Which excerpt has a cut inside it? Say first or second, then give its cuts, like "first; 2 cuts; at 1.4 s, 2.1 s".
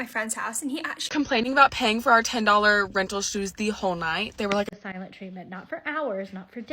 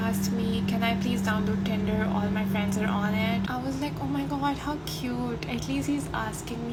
first; 2 cuts; at 1.1 s, 4.7 s